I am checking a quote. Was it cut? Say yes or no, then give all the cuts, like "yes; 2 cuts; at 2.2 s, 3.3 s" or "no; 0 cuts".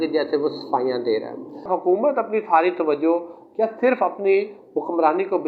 yes; 1 cut; at 1.7 s